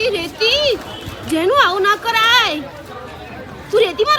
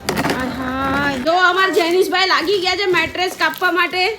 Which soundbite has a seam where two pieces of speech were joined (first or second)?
second